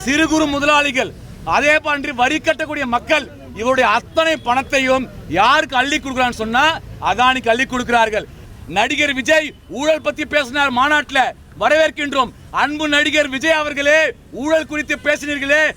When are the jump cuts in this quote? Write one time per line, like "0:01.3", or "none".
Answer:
0:08.5